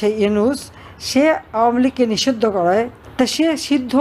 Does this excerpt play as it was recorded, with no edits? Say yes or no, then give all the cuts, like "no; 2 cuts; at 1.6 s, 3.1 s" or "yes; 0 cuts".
no; 1 cut; at 3.0 s